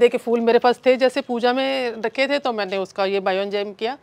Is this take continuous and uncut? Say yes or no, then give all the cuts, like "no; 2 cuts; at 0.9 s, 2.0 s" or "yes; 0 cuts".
yes; 0 cuts